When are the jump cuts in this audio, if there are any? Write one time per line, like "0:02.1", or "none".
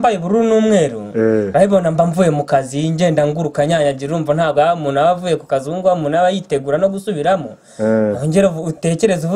none